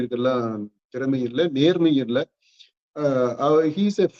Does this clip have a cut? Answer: no; 0 cuts

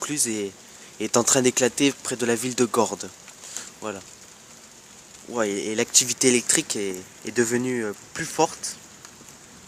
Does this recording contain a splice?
no; 0 cuts

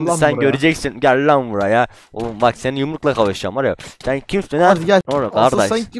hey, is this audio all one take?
no; 1 cut; at 5.0 s

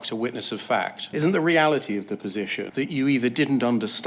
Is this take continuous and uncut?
no; 2 cuts; at 1.0 s, 2.6 s

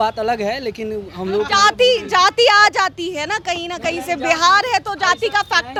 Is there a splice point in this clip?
no; 0 cuts

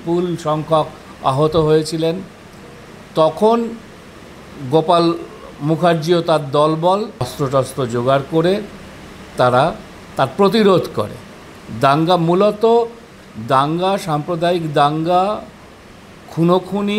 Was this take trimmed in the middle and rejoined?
yes; 1 cut; at 7.3 s

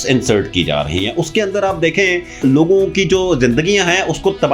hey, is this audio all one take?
no; 1 cut; at 2.4 s

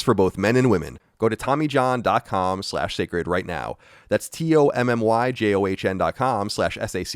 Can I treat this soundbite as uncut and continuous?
no; 1 cut; at 0.9 s

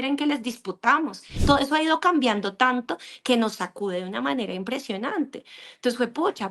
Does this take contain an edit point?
yes; 1 cut; at 1.3 s

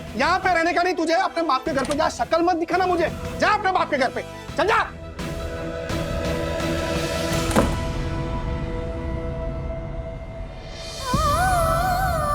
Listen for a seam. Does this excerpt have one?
no; 0 cuts

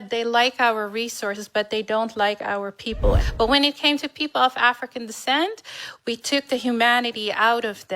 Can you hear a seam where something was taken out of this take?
yes; 1 cut; at 3.2 s

